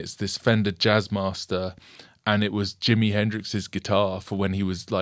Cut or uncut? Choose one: uncut